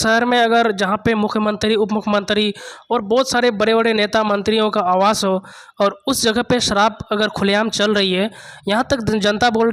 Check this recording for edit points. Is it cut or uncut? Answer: uncut